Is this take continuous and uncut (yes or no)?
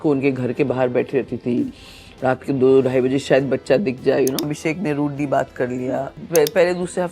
no